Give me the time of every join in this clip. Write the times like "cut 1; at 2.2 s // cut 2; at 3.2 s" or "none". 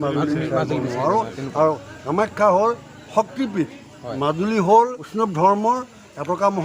cut 1; at 4.1 s // cut 2; at 5.0 s

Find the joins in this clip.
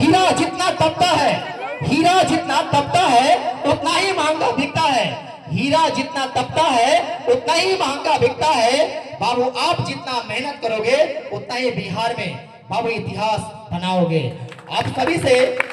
none

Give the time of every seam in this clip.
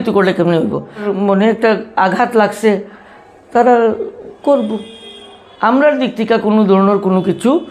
cut 1; at 1.1 s

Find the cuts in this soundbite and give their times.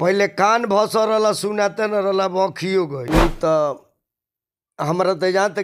cut 1; at 3.0 s

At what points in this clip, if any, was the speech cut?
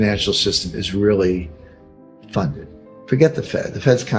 none

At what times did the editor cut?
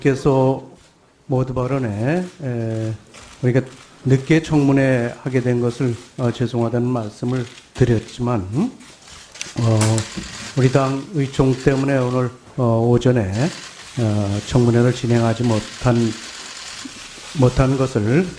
cut 1; at 13.8 s

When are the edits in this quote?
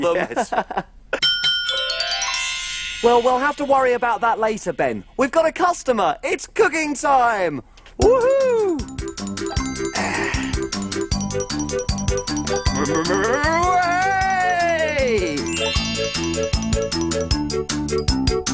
none

